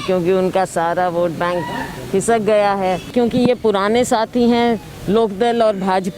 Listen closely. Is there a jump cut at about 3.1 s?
yes; 1 cut; at 3.1 s

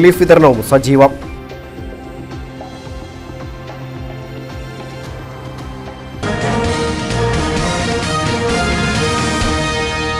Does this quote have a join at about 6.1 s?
yes; 1 cut; at 6.1 s

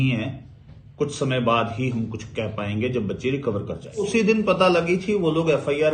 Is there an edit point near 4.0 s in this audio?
yes; 1 cut; at 4.0 s

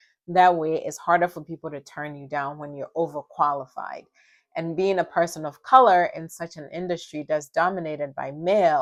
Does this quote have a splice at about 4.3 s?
no; 0 cuts

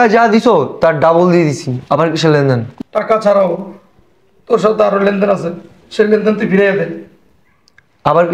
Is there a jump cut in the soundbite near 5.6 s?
no; 1 cut; at 2.7 s

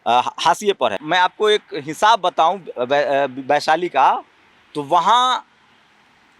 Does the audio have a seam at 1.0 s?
yes; 1 cut; at 1.0 s

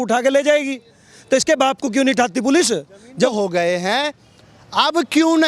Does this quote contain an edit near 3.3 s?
yes; 1 cut; at 3.3 s

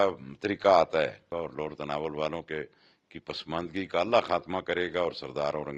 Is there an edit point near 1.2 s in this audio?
yes; 1 cut; at 1.2 s

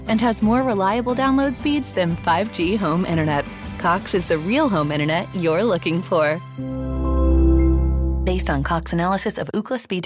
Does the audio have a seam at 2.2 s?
no; 0 cuts

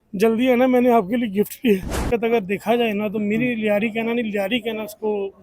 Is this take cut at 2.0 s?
yes; 1 cut; at 2.0 s

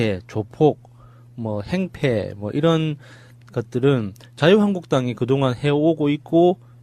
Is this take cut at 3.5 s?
no; 0 cuts

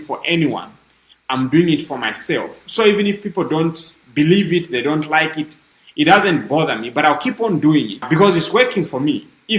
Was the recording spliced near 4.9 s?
no; 1 cut; at 8.1 s

